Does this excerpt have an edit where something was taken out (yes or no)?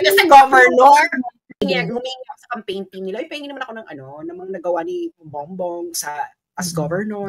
yes